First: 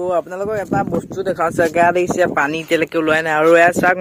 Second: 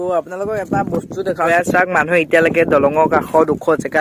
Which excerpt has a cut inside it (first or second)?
second